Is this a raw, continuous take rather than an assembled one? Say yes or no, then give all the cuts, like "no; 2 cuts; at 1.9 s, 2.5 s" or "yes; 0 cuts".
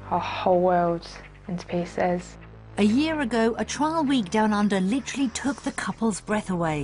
no; 1 cut; at 2.2 s